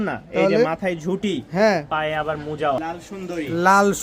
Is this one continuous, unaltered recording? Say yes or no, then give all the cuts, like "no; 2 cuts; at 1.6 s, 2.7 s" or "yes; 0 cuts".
no; 1 cut; at 2.9 s